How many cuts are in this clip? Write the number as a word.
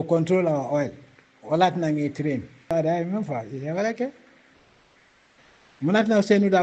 one